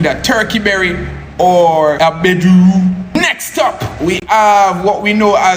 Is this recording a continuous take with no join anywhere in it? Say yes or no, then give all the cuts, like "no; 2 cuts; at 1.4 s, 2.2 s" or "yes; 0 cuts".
yes; 0 cuts